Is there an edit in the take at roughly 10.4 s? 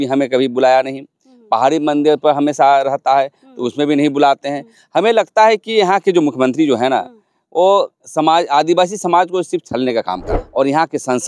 yes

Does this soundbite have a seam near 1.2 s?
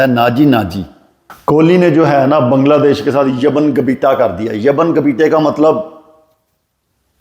yes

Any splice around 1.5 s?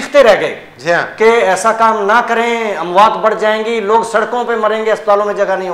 no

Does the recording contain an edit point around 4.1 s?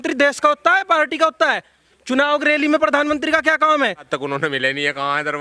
yes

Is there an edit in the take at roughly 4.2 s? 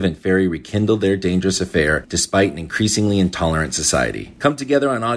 yes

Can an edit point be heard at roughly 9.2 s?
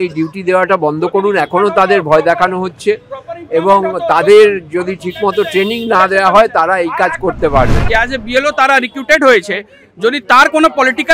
no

